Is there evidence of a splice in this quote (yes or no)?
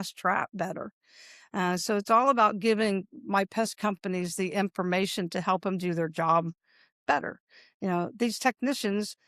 no